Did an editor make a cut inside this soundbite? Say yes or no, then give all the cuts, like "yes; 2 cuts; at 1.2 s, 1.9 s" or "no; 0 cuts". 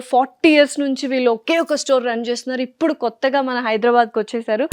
no; 0 cuts